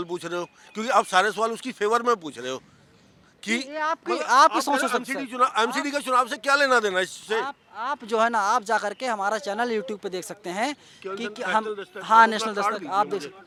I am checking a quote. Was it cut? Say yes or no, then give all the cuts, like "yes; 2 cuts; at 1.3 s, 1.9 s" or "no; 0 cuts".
no; 0 cuts